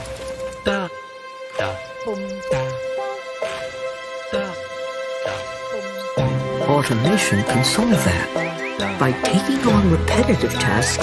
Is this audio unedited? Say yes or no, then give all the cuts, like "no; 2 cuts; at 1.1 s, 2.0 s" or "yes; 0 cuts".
yes; 0 cuts